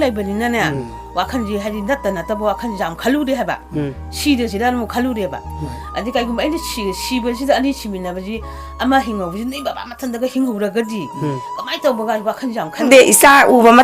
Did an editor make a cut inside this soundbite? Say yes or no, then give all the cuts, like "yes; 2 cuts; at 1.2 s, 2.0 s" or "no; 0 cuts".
yes; 1 cut; at 12.8 s